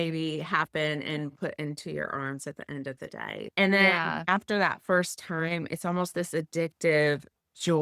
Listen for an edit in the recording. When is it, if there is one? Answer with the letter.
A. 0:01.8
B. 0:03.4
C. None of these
B